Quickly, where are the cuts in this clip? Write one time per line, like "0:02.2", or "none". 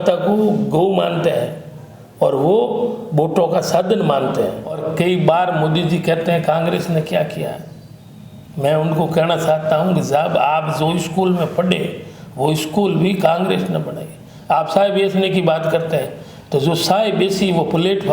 0:04.8